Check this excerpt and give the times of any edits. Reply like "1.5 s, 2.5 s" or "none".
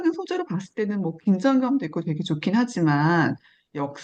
none

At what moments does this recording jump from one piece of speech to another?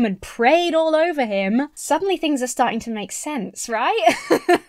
1.8 s

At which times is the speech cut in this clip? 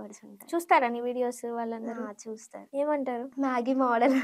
2.5 s, 3.3 s

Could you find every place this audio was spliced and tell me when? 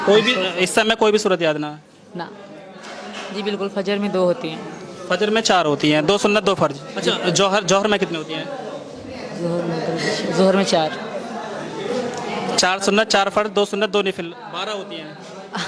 2.4 s, 6.9 s

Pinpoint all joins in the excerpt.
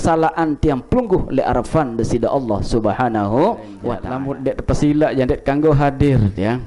4.1 s

